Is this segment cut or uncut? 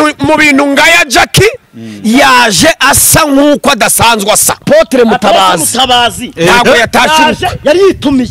cut